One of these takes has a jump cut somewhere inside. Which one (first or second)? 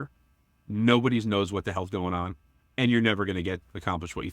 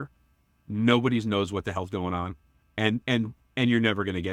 first